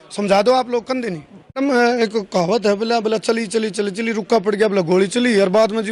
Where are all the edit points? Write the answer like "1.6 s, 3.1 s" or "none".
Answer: 1.6 s